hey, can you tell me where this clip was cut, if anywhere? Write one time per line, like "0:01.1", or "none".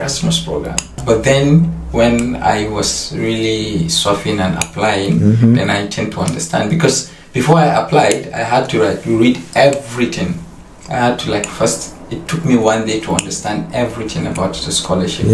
0:01.0